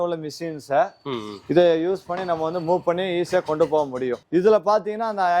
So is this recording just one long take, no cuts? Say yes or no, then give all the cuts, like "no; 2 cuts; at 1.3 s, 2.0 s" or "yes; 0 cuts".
no; 1 cut; at 4.2 s